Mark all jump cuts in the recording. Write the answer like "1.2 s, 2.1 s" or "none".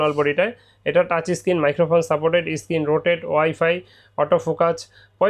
none